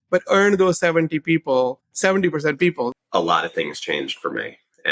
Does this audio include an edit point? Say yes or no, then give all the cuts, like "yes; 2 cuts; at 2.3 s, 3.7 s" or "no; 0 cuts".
yes; 1 cut; at 2.9 s